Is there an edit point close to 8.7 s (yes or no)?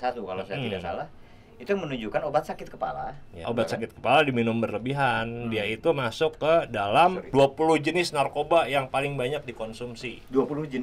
no